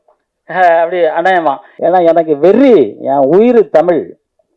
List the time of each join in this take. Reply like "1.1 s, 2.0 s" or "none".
1.7 s